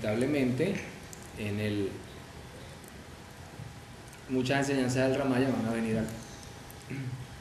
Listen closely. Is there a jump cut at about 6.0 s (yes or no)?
no